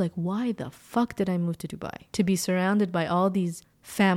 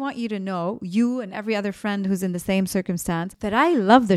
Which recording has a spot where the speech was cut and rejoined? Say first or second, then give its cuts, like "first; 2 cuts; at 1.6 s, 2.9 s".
first; 1 cut; at 2.1 s